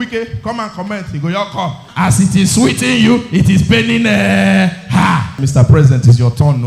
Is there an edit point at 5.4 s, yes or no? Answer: yes